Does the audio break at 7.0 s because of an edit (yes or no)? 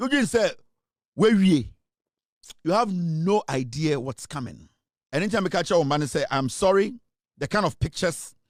no